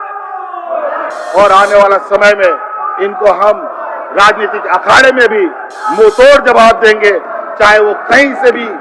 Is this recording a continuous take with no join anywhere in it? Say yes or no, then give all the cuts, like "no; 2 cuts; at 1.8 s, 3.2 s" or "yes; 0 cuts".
no; 1 cut; at 1.1 s